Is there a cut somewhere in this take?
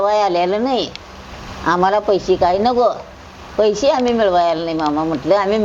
no; 0 cuts

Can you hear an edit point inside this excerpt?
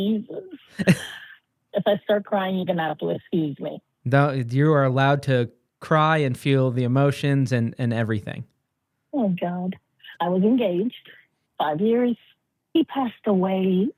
no; 0 cuts

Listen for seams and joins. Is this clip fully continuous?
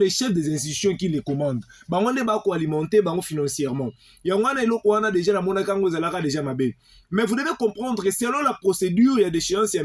yes; 0 cuts

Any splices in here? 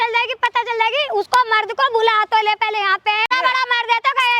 yes; 1 cut; at 3.3 s

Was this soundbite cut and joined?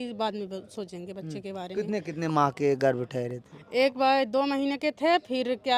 no; 0 cuts

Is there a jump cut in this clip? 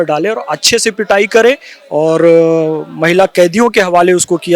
no; 0 cuts

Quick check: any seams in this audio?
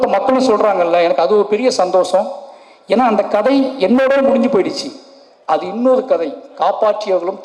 no; 0 cuts

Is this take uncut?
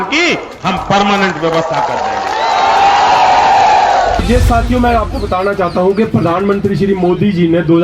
no; 1 cut; at 4.2 s

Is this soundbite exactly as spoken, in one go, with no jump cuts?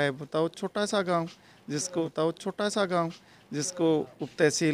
yes; 0 cuts

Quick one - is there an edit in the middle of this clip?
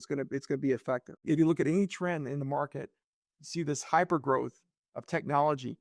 yes; 1 cut; at 1.2 s

